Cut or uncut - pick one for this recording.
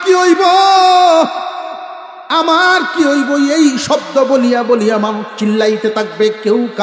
uncut